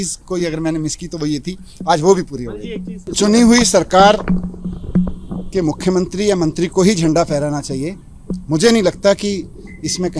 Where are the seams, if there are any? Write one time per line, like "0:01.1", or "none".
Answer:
0:03.0